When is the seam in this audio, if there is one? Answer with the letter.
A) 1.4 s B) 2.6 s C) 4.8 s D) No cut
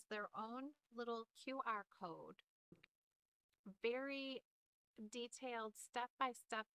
B